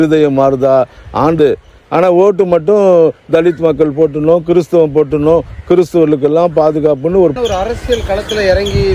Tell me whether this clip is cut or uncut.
cut